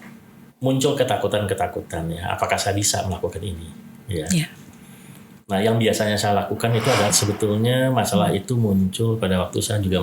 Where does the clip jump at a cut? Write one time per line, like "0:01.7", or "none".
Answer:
0:07.2